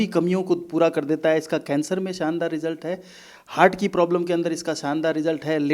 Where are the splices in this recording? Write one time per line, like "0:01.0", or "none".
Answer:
none